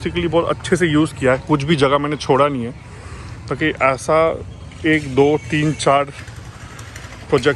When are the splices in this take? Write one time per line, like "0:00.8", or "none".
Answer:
none